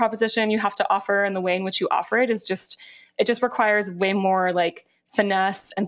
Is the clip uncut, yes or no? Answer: yes